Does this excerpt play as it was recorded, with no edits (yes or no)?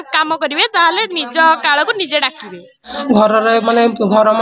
no